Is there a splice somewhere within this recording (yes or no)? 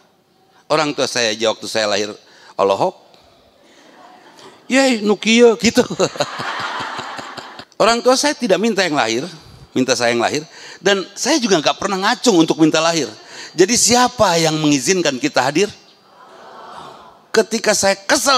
yes